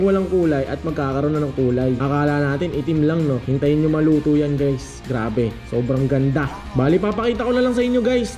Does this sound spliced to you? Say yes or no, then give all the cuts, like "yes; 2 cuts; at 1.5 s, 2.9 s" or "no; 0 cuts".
no; 0 cuts